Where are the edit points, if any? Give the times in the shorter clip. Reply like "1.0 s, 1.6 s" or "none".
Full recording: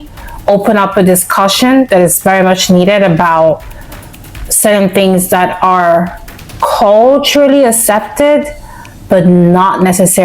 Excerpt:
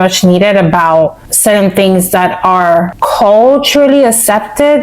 1.3 s, 2.9 s